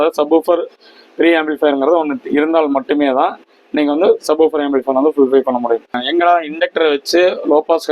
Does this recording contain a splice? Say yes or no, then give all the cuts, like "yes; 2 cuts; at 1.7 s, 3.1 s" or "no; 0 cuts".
yes; 1 cut; at 6.0 s